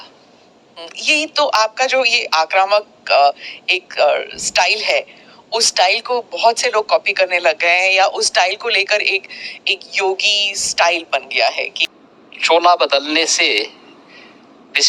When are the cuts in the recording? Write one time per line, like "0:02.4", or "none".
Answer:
0:11.8